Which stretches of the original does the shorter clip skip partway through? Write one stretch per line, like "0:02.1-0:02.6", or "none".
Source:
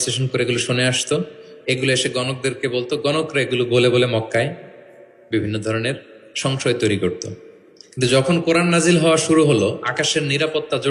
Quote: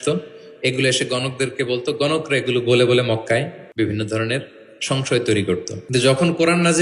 0:04.6-0:05.1
0:07.3-0:07.8